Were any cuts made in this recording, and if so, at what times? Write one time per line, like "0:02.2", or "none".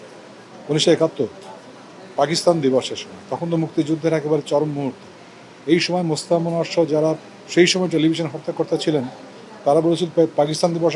none